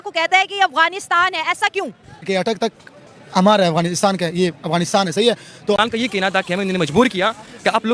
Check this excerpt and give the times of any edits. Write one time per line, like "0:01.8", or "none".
0:05.8